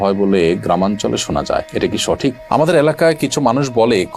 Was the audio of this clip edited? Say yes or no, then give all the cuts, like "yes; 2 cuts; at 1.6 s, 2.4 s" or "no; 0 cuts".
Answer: yes; 1 cut; at 2.4 s